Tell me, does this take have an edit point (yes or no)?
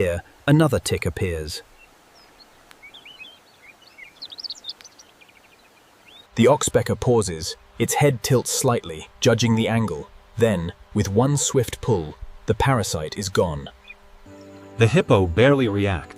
no